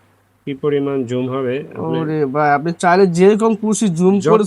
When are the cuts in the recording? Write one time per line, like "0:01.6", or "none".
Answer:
none